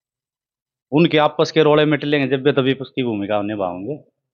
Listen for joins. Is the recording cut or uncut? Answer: uncut